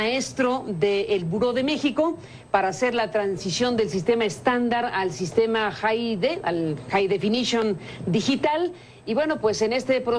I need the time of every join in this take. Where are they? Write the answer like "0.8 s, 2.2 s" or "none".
5.5 s